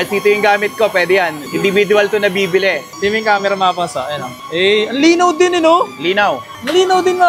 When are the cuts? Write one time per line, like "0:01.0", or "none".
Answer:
0:02.9

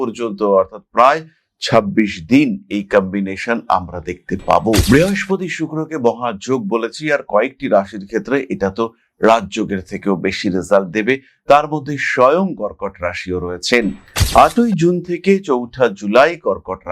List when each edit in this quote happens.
0:14.1

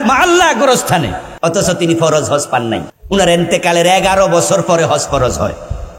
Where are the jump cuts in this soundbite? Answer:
0:01.2
0:02.9

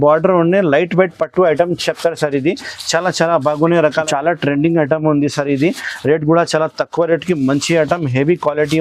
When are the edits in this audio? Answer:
0:04.0

